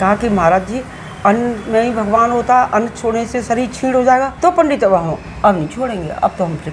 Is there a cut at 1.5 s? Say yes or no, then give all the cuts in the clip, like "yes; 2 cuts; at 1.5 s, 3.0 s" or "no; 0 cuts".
no; 1 cut; at 4.3 s